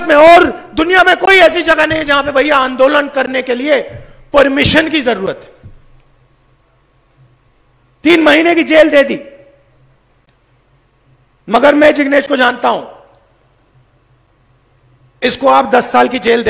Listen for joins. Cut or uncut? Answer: uncut